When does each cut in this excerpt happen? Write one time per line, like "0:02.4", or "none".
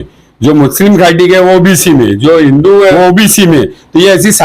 0:02.9